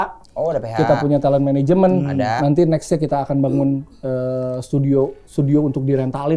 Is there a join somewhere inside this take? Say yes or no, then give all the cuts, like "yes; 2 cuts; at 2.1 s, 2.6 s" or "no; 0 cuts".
no; 0 cuts